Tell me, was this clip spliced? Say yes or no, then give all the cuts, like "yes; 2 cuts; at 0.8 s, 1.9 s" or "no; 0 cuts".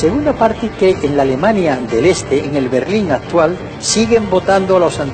no; 0 cuts